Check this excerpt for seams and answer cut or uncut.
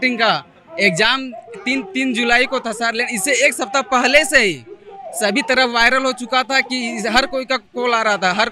uncut